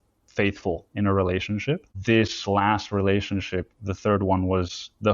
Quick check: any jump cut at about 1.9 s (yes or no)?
yes